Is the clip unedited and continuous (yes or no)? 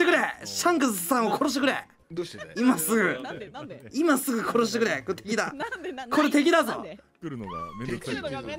yes